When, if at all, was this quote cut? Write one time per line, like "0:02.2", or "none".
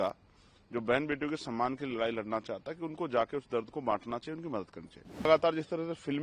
0:05.2